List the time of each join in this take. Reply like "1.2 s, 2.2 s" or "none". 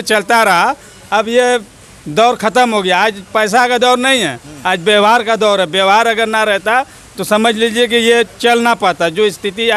none